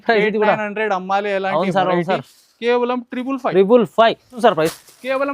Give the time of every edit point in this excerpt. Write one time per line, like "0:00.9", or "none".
0:04.4